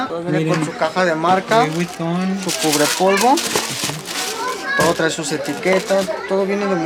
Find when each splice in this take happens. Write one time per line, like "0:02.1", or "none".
none